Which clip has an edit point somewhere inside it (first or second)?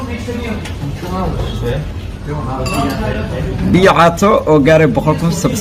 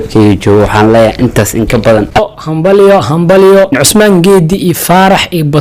second